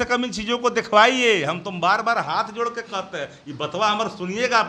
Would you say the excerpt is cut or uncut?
uncut